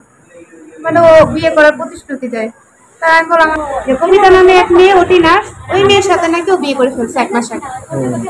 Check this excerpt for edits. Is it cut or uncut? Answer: cut